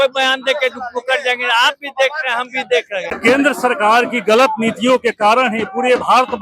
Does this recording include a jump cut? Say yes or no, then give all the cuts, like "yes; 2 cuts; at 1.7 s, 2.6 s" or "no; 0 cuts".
no; 0 cuts